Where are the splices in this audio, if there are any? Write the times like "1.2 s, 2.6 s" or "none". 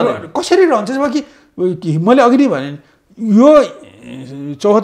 none